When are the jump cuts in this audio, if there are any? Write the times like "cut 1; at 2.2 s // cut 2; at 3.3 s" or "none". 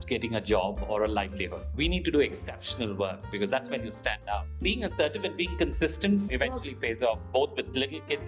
cut 1; at 1.7 s // cut 2; at 4.5 s // cut 3; at 6.3 s